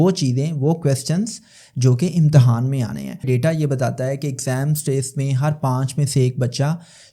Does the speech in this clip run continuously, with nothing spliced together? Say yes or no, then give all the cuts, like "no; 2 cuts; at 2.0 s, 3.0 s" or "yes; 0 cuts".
no; 1 cut; at 3.2 s